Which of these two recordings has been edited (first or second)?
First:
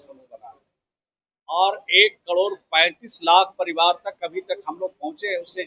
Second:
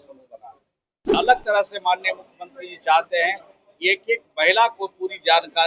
second